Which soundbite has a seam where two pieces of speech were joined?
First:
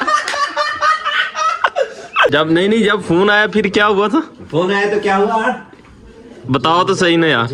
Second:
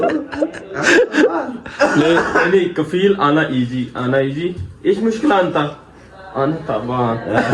first; 1 cut; at 2.3 s

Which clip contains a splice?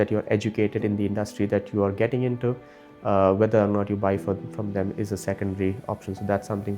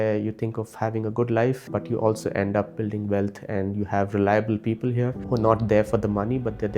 second; 2 cuts; at 1.6 s, 5.2 s

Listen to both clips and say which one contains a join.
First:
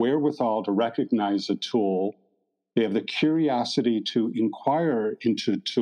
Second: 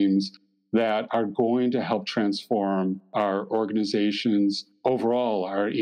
second; 2 cuts; at 3.0 s, 4.7 s

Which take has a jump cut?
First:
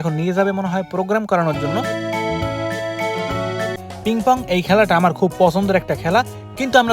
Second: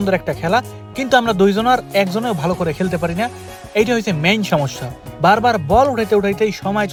first; 1 cut; at 3.8 s

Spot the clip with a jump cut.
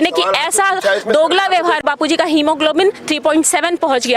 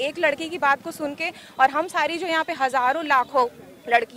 first; 1 cut; at 1.8 s

